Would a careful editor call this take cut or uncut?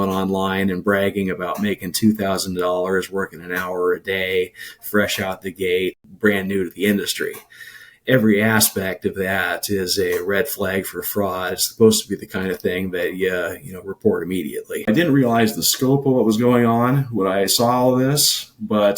cut